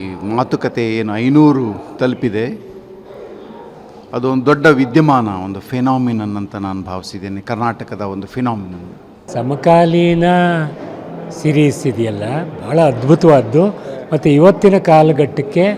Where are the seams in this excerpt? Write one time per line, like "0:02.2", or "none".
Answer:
0:09.3